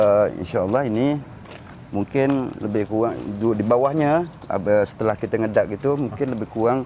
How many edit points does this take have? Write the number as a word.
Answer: zero